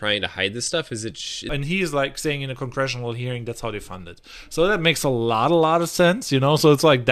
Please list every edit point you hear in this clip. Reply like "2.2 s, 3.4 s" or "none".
1.5 s